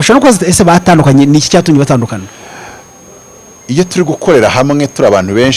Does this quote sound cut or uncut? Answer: uncut